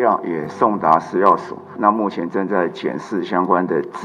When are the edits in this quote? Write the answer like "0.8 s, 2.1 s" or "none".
1.7 s